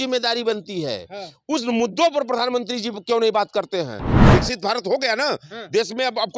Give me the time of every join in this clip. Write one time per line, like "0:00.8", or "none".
0:04.1